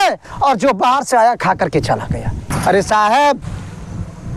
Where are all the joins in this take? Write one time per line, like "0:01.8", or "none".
0:02.3